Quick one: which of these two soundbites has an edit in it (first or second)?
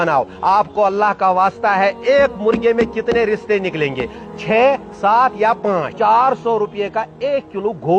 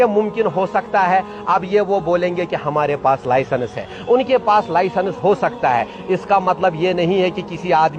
first